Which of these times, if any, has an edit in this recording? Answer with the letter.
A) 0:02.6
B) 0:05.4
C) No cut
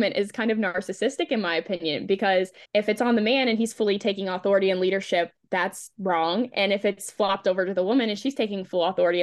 A